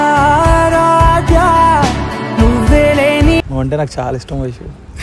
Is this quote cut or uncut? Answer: cut